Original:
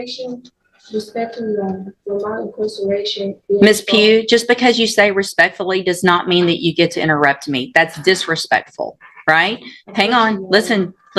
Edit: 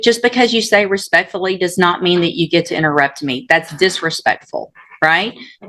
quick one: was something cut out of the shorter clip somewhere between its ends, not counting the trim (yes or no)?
no